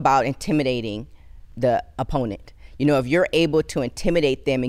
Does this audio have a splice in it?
yes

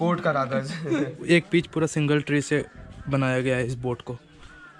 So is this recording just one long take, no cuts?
no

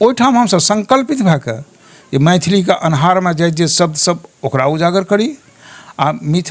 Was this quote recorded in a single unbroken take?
yes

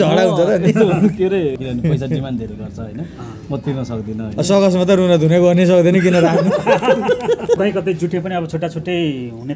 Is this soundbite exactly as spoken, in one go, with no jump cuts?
no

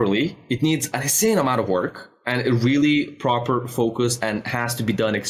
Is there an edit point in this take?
no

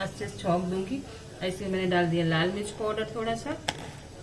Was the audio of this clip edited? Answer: no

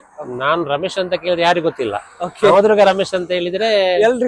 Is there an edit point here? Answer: no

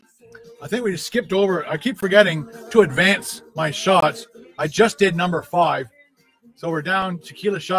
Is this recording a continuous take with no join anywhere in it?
yes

